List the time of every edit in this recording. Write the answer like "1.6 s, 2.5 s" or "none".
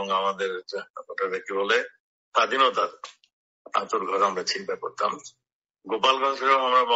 none